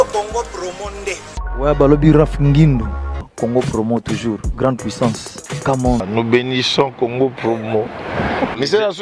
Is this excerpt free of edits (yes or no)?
yes